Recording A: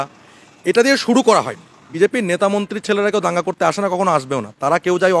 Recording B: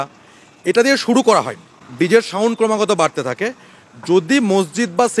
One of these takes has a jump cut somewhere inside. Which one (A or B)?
A